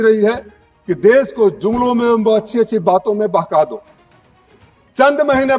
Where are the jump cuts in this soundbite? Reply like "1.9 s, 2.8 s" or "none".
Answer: none

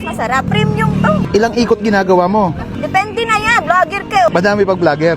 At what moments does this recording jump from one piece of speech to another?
1.2 s, 2.7 s

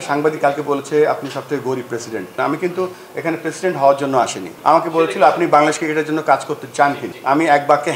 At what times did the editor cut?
2.3 s, 4.5 s, 7.1 s

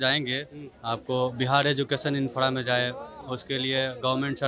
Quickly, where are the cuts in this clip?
none

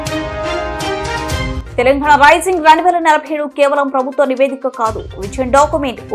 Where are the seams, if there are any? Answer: 1.6 s

